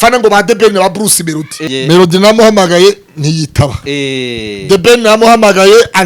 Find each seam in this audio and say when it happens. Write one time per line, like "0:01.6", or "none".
0:01.6